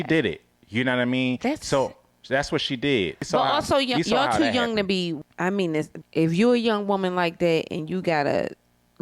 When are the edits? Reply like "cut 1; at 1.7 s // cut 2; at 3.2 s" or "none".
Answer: cut 1; at 3.3 s // cut 2; at 5.3 s // cut 3; at 6.0 s